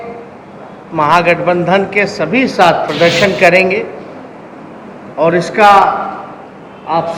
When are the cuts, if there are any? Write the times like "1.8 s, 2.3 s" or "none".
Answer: 2.9 s